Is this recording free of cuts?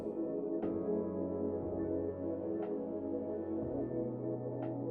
yes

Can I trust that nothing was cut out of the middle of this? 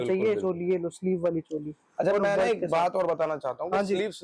yes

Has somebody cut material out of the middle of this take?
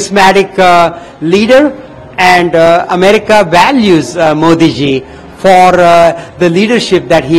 no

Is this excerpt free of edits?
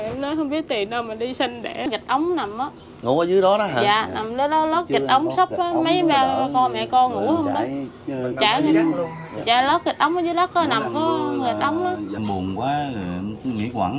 no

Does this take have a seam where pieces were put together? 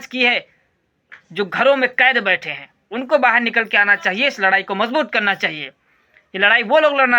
no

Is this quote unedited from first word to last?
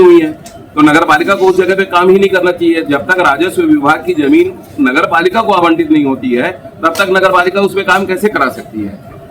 yes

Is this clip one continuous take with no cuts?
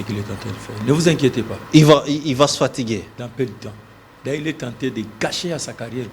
yes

